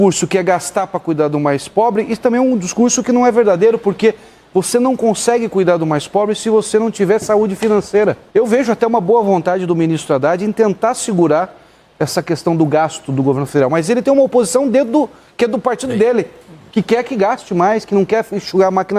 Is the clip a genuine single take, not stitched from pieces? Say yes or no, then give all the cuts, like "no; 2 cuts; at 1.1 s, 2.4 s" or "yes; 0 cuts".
no; 1 cut; at 8.2 s